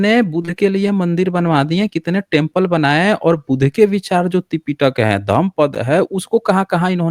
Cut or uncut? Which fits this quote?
uncut